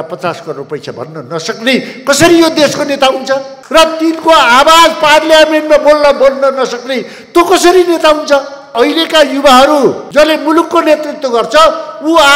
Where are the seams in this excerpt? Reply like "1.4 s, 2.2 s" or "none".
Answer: 8.7 s, 10.0 s